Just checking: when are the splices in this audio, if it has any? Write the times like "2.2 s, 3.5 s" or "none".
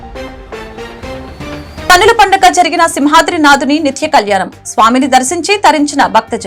none